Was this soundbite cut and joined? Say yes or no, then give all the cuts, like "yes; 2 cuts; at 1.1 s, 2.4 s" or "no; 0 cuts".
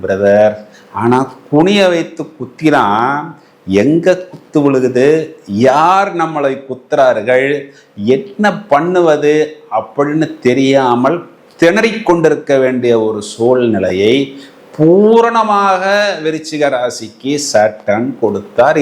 no; 0 cuts